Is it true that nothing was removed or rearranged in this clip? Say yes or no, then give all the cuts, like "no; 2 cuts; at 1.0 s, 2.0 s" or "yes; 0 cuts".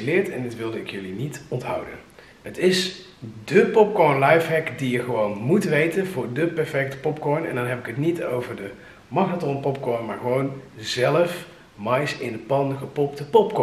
yes; 0 cuts